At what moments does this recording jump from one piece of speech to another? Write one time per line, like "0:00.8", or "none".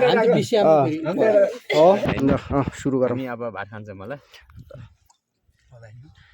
0:02.0